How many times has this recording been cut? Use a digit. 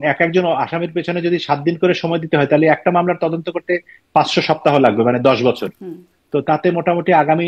0